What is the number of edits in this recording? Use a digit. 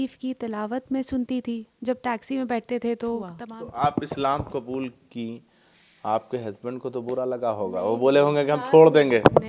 1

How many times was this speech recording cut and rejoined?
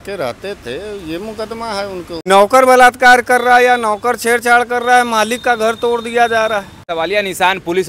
2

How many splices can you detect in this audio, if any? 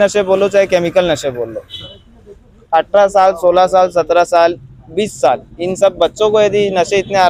0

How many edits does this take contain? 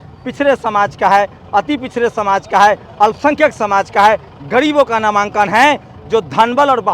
0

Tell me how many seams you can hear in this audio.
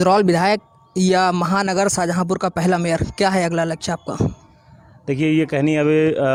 0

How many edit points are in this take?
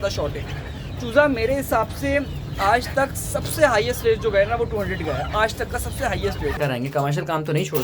1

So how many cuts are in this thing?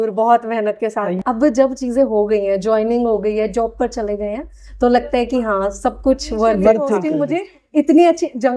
2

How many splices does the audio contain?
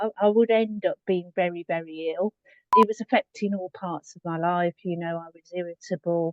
1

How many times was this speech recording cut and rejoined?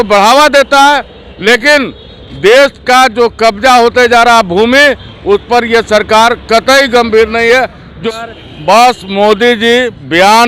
1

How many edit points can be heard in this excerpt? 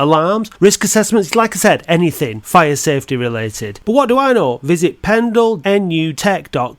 1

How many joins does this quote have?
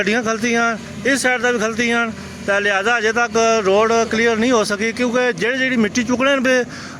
0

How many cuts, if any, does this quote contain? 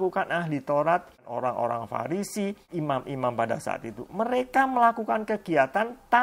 2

